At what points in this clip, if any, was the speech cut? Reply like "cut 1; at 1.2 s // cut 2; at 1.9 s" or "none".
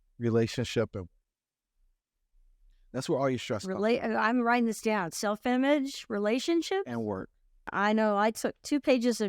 cut 1; at 7.7 s

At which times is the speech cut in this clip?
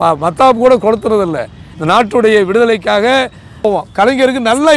cut 1; at 3.6 s

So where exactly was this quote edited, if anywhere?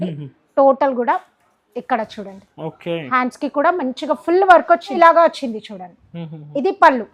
cut 1; at 5.0 s

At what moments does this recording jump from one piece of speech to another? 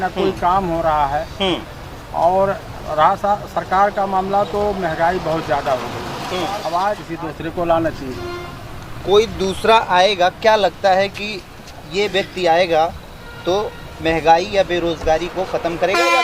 cut 1; at 7.1 s

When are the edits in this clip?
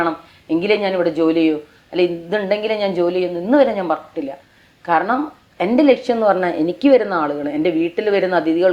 none

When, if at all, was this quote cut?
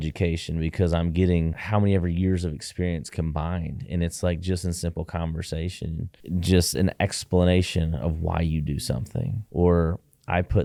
none

